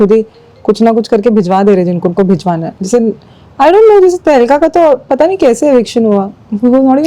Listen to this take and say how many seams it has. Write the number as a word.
zero